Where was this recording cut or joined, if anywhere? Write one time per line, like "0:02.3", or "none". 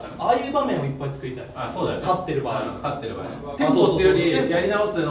0:03.5